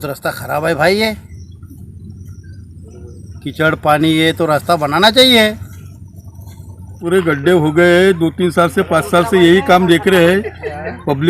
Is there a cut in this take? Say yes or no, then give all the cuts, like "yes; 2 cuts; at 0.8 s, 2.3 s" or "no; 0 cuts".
yes; 1 cut; at 6.8 s